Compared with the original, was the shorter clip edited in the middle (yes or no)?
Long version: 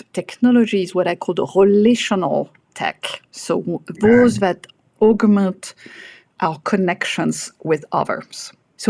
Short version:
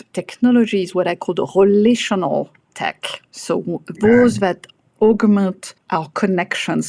yes